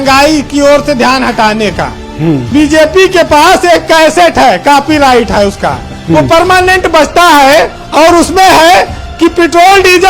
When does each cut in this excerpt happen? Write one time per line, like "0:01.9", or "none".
0:02.4